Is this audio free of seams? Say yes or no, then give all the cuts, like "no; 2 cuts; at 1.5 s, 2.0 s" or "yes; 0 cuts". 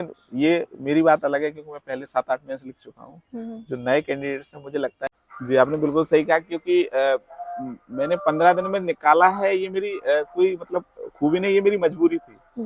no; 1 cut; at 5.1 s